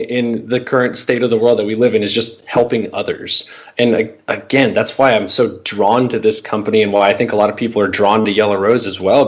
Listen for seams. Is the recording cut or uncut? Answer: uncut